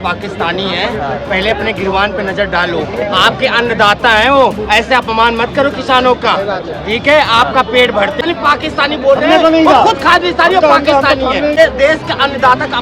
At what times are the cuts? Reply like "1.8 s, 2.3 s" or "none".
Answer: 8.2 s, 11.6 s